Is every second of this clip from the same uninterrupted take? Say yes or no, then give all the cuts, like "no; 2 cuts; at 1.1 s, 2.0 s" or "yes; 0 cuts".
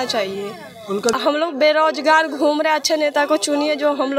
no; 1 cut; at 1.1 s